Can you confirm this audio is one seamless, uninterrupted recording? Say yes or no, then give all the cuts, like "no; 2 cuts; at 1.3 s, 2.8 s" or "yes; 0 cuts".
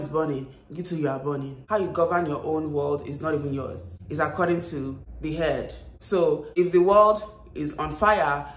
no; 1 cut; at 1.6 s